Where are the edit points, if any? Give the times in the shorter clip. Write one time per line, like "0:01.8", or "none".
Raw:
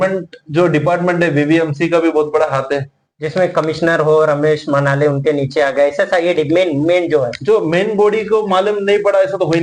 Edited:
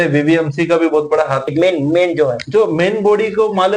0:01.5